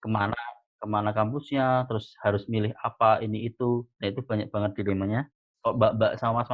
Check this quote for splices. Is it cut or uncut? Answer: cut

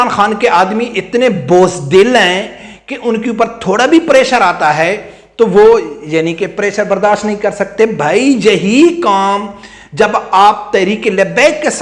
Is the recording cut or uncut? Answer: uncut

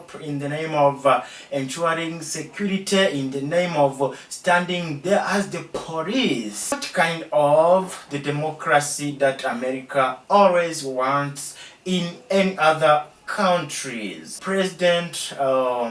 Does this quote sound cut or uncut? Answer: cut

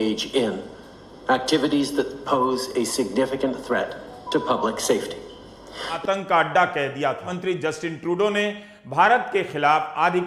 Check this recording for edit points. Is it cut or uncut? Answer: cut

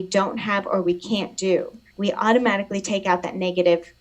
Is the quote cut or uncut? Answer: cut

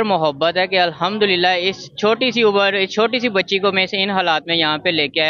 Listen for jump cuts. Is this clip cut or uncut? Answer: uncut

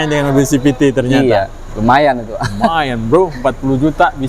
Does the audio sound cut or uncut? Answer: cut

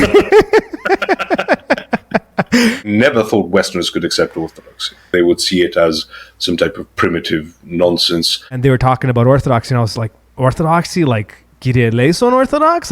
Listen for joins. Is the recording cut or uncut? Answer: cut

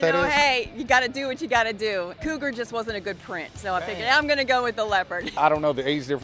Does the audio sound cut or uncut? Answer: cut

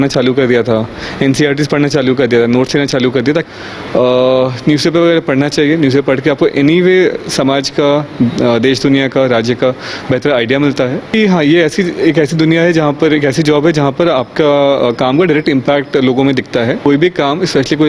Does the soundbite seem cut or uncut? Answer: cut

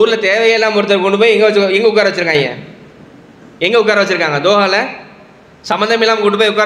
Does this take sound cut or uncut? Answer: uncut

